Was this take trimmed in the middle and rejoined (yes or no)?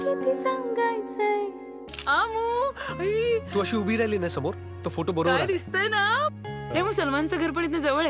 yes